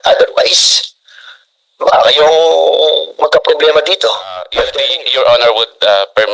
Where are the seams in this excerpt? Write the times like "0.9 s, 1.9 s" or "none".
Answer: 4.6 s